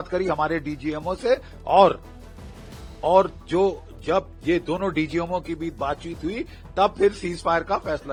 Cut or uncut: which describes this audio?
uncut